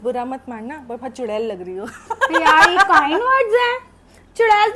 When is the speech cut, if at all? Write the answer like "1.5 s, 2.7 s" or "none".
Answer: none